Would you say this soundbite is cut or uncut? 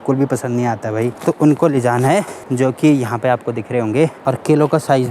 cut